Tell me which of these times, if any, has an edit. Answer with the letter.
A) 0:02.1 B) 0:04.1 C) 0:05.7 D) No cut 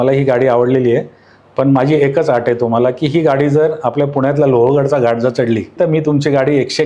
C